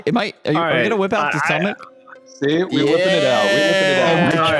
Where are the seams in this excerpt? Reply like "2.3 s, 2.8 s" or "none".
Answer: none